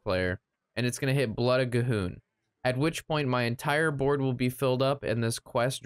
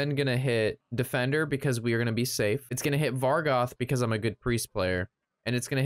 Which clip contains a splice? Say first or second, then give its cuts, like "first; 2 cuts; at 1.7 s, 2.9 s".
second; 2 cuts; at 0.8 s, 2.7 s